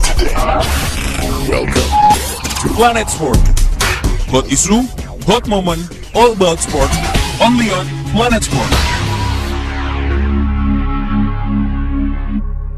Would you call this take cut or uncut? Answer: uncut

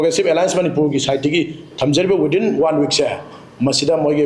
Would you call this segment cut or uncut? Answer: uncut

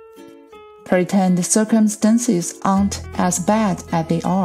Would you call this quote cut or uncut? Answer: uncut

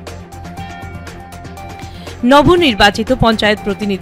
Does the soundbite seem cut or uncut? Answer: cut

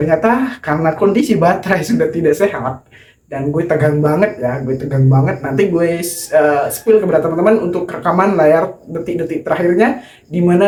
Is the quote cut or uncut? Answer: uncut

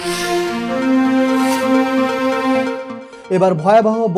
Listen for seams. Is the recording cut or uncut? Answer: cut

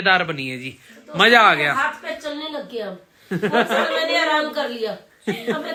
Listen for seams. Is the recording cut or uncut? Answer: uncut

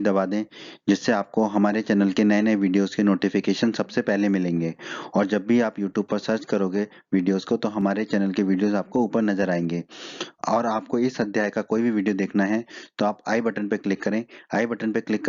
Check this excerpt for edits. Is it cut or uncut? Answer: cut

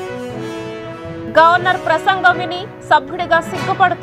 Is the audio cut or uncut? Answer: cut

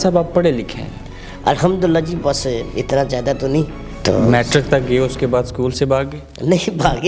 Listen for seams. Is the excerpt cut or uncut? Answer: cut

